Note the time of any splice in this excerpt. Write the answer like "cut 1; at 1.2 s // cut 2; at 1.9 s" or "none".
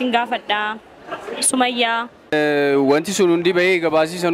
cut 1; at 2.3 s

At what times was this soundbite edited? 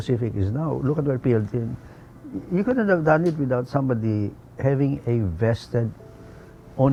none

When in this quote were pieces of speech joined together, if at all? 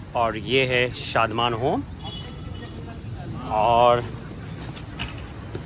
none

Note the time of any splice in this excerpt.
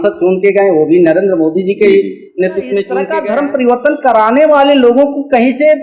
cut 1; at 3.0 s

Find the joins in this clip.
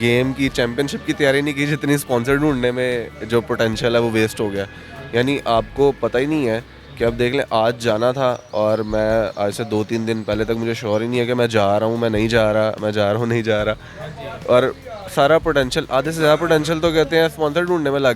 none

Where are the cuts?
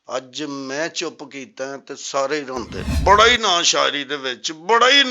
cut 1; at 2.9 s

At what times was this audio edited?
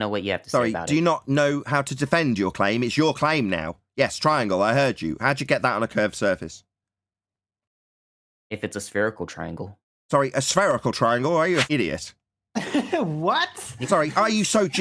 cut 1; at 11.7 s

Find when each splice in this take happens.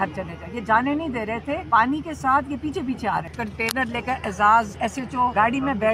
cut 1; at 1.6 s // cut 2; at 3.4 s // cut 3; at 5.1 s

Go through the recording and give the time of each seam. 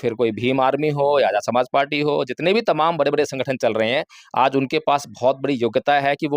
none

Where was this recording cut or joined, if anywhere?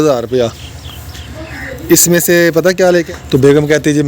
cut 1; at 3.1 s

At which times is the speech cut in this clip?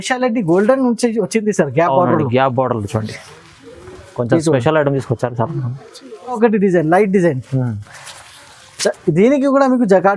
cut 1; at 6.4 s

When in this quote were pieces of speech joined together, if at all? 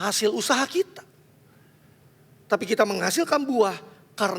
none

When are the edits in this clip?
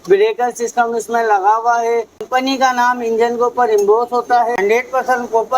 cut 1; at 2.2 s // cut 2; at 4.6 s

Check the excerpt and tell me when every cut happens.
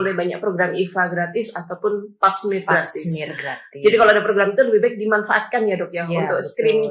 none

